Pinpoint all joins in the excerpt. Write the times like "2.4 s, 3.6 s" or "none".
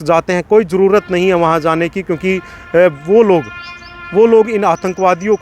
none